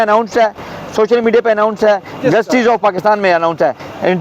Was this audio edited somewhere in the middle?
no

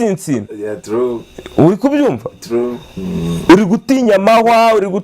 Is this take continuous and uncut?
yes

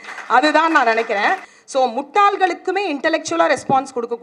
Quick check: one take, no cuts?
no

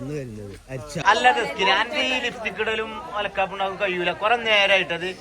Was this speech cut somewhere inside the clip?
yes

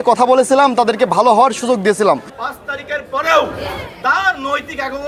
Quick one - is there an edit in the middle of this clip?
yes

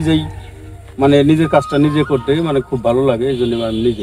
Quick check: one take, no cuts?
yes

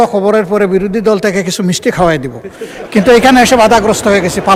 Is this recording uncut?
yes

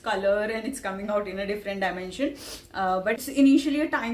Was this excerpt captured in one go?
no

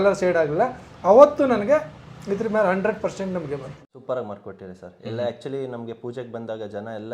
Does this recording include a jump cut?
yes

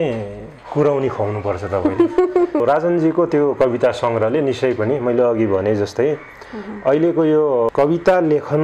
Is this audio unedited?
no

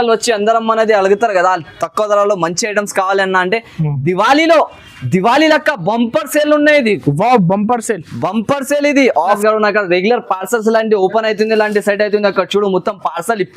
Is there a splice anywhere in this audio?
yes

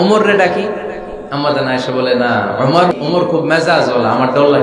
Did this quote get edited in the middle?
yes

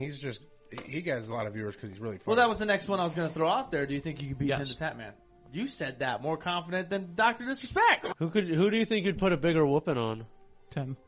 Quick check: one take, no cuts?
no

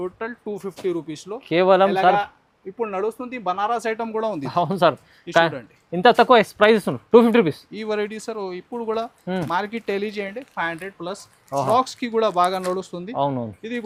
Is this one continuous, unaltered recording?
yes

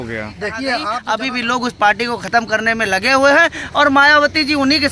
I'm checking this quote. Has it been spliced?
yes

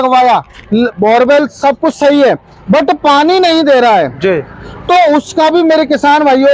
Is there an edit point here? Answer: no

